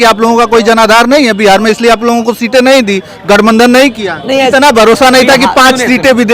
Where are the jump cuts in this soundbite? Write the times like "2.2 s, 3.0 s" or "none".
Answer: 4.5 s